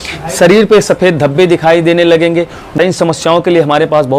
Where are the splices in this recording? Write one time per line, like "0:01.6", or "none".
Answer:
0:02.7